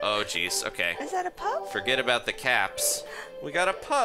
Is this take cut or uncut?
uncut